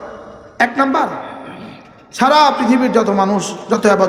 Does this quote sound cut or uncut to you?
uncut